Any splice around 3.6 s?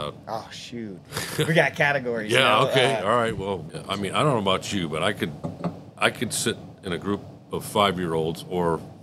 yes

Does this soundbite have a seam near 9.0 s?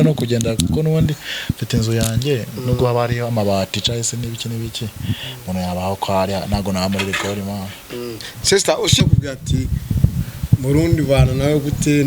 yes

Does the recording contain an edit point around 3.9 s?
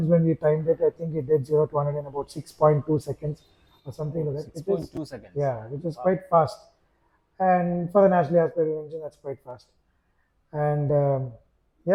no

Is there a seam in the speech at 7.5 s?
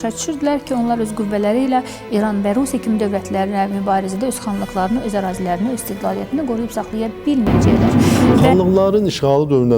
yes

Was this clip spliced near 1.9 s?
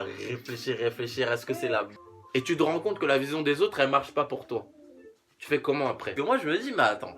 yes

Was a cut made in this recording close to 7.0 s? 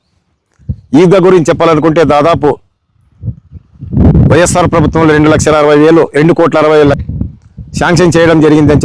yes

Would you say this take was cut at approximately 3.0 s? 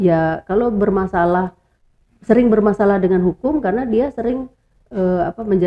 no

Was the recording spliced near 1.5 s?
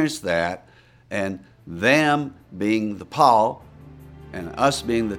no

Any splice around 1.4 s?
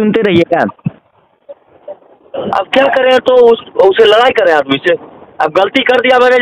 no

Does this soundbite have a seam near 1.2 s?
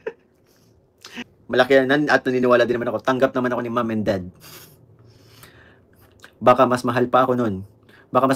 yes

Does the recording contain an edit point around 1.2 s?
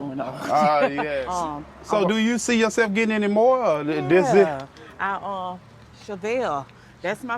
yes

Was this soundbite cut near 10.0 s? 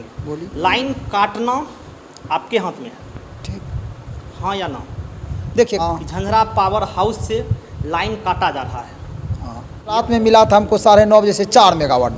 yes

